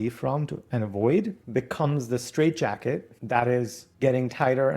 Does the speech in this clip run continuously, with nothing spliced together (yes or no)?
no